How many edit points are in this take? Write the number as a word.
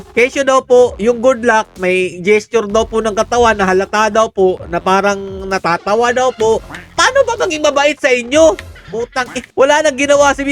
one